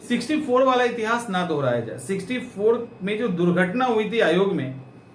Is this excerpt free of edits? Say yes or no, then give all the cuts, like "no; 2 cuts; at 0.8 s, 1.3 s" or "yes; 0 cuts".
yes; 0 cuts